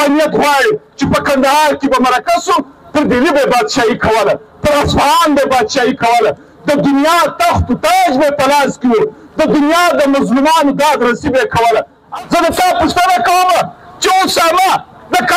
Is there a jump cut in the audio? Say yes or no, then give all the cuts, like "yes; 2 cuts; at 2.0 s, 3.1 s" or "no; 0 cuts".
yes; 1 cut; at 12.0 s